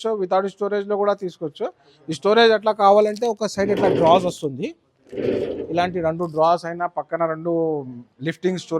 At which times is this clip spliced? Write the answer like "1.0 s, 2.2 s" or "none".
none